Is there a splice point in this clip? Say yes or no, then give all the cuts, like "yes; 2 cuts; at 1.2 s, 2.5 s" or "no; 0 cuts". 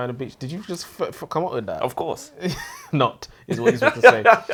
no; 0 cuts